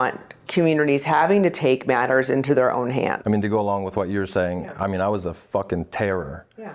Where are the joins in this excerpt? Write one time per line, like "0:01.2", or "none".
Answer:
0:03.2